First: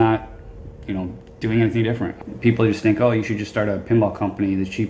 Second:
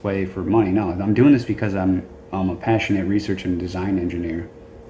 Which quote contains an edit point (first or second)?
first